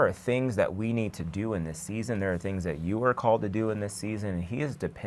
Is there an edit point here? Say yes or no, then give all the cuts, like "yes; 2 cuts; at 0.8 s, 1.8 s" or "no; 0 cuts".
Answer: no; 0 cuts